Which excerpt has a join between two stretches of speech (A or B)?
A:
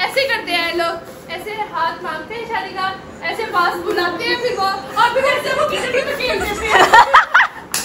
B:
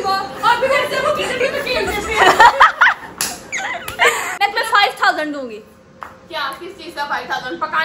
B